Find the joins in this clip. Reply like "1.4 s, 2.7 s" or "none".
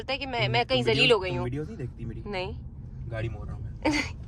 none

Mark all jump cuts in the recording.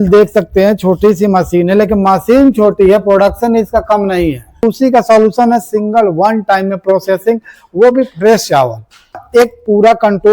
4.6 s, 9.2 s

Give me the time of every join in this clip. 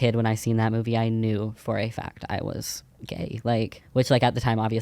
3.8 s

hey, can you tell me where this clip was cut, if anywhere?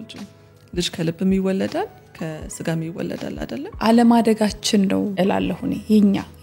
3.7 s, 5.2 s

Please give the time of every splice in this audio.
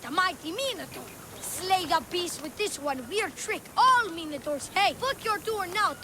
5.0 s

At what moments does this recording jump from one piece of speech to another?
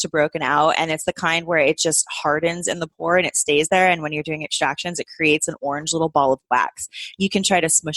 none

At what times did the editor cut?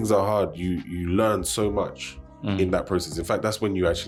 none

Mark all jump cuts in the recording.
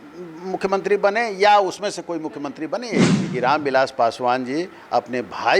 3.2 s

